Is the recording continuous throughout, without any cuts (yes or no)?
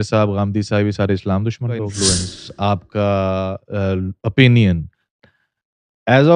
no